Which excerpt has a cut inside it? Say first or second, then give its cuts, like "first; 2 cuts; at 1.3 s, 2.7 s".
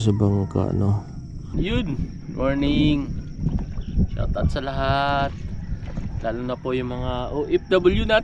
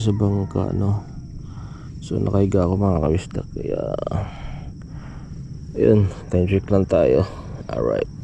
first; 1 cut; at 1.5 s